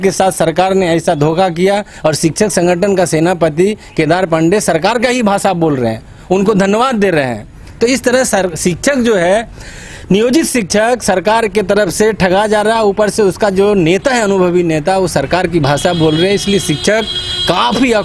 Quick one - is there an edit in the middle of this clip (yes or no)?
no